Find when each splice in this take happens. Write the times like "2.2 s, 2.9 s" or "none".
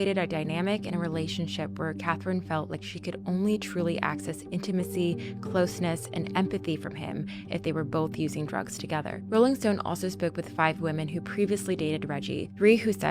12.0 s